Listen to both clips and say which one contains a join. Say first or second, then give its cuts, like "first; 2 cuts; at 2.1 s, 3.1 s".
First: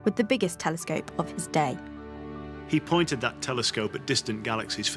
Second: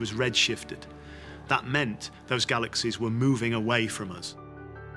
second; 1 cut; at 2.3 s